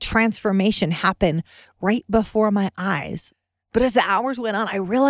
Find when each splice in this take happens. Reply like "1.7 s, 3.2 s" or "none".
3.2 s